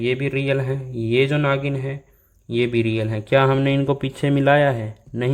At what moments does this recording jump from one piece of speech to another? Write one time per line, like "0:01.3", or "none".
none